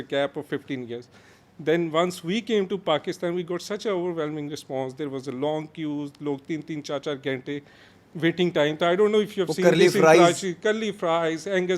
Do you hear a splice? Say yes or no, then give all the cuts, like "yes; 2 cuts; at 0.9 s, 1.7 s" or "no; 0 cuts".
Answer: no; 0 cuts